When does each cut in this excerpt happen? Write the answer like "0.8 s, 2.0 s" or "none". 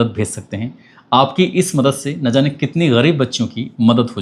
none